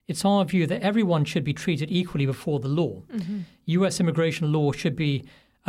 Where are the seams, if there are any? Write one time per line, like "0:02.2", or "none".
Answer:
none